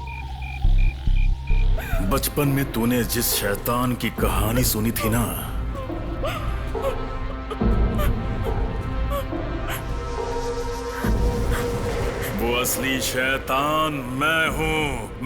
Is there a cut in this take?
yes; 1 cut; at 1.8 s

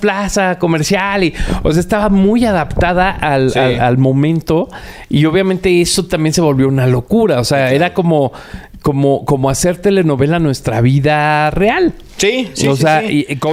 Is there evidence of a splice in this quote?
no; 0 cuts

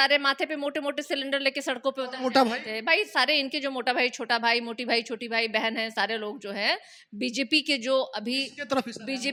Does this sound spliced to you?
no; 0 cuts

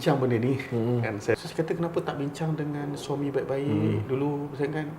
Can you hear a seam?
yes; 1 cut; at 1.3 s

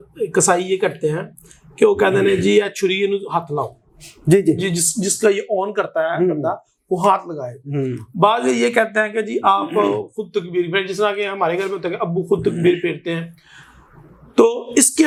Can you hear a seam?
no; 0 cuts

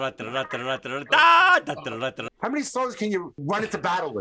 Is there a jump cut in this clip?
yes; 2 cuts; at 2.3 s, 3.4 s

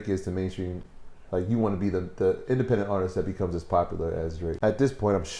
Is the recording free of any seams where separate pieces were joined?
no; 1 cut; at 4.4 s

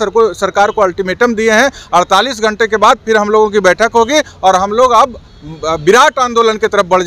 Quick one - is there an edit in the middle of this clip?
no; 0 cuts

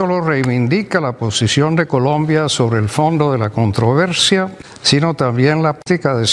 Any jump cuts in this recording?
no; 0 cuts

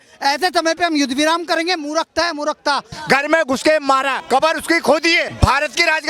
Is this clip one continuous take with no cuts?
no; 3 cuts; at 2.9 s, 4.2 s, 5.3 s

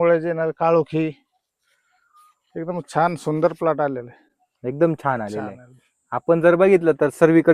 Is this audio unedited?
yes; 0 cuts

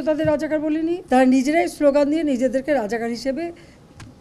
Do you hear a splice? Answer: yes; 1 cut; at 1.0 s

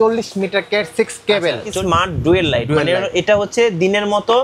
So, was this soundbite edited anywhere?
yes; 1 cut; at 1.7 s

